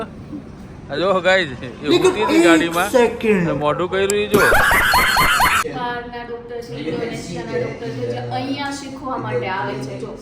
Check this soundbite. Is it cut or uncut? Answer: cut